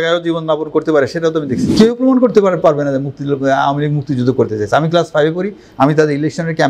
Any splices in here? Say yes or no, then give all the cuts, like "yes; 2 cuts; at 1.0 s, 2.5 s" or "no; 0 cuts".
yes; 1 cut; at 1.6 s